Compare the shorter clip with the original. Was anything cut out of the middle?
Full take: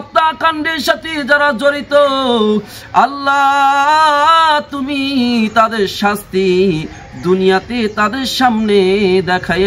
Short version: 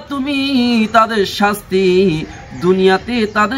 no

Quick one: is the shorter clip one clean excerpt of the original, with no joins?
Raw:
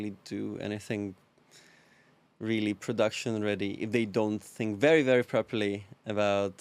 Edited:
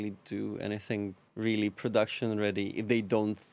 no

